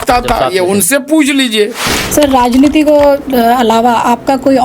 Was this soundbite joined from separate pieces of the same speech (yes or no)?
yes